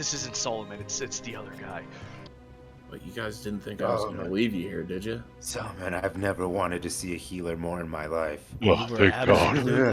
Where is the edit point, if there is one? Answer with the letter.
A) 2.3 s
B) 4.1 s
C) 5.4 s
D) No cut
A